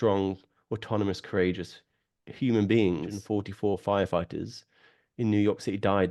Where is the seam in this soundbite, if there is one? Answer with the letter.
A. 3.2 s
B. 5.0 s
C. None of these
A